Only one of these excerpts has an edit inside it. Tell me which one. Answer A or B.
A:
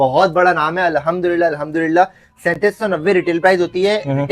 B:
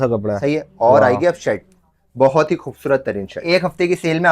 B